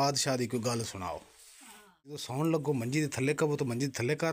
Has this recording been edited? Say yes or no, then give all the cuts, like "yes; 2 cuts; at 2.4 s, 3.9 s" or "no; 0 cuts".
yes; 1 cut; at 2.2 s